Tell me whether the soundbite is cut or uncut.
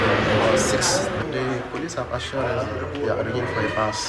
cut